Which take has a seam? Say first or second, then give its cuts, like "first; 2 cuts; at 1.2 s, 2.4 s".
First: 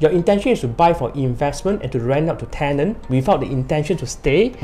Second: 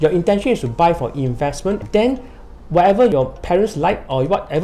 second; 2 cuts; at 1.8 s, 3.1 s